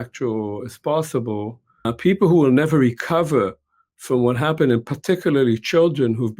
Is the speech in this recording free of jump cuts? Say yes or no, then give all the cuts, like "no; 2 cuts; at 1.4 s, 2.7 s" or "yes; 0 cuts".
no; 1 cut; at 1.9 s